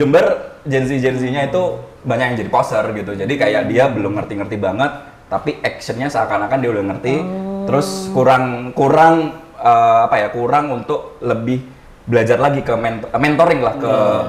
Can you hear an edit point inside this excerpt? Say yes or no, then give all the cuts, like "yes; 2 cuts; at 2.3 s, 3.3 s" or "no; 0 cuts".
no; 0 cuts